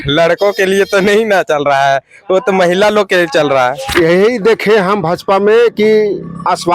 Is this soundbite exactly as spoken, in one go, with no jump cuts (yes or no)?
no